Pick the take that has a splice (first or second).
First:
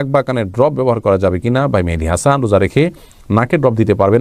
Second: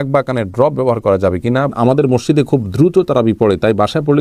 second